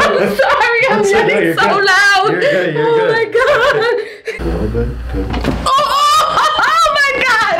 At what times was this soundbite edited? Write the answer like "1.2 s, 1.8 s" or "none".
4.3 s